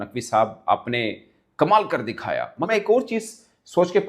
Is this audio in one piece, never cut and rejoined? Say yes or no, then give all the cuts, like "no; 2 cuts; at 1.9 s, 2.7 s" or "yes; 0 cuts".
no; 1 cut; at 2.7 s